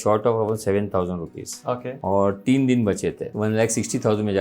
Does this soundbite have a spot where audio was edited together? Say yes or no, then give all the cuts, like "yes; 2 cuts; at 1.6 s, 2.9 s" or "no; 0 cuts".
yes; 2 cuts; at 1.9 s, 3.2 s